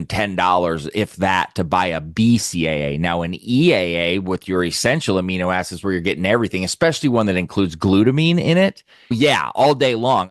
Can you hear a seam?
no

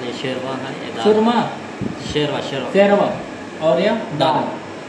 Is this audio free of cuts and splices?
yes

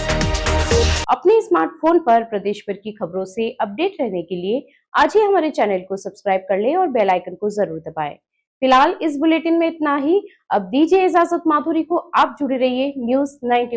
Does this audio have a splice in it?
no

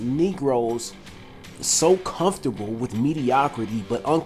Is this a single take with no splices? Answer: yes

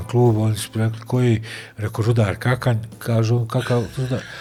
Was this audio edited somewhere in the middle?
no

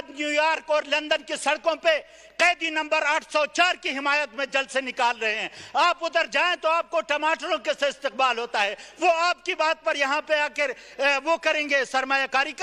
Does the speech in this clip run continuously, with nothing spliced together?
yes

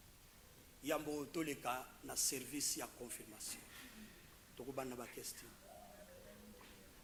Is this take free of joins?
yes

